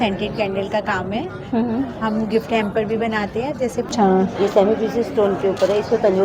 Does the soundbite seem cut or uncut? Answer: cut